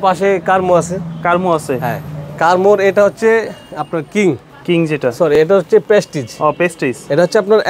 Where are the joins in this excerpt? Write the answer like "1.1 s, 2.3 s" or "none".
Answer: none